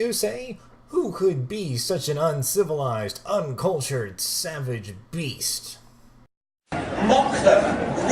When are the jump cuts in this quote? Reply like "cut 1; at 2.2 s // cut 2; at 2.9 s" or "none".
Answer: cut 1; at 6.9 s